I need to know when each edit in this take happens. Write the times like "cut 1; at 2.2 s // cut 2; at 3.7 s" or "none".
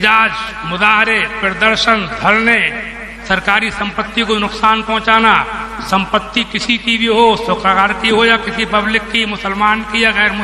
none